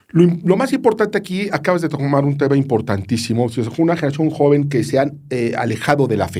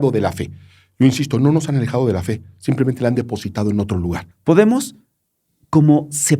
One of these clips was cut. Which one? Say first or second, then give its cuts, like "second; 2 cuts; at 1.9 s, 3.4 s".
second; 1 cut; at 4.3 s